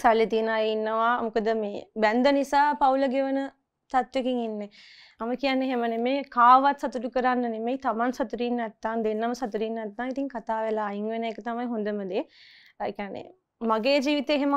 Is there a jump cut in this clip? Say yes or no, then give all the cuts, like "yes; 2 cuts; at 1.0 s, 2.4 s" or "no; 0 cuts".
no; 0 cuts